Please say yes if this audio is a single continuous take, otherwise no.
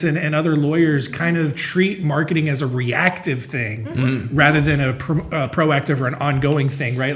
yes